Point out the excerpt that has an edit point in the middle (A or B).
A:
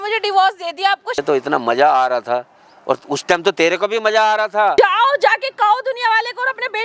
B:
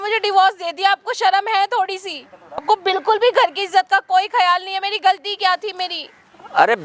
A